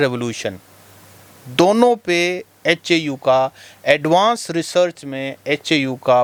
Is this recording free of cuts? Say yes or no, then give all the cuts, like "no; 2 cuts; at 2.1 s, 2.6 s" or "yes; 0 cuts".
yes; 0 cuts